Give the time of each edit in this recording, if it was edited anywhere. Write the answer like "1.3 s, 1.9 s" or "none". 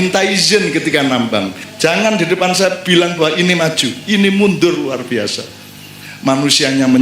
1.6 s, 2.8 s